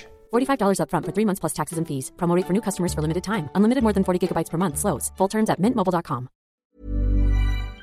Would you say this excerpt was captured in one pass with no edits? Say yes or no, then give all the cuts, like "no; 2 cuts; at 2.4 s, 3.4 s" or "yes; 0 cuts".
no; 1 cut; at 6.6 s